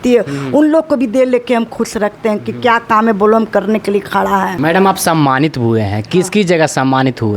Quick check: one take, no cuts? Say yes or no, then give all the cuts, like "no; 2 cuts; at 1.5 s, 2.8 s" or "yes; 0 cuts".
no; 1 cut; at 4.5 s